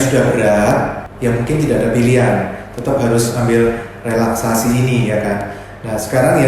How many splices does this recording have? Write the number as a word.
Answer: one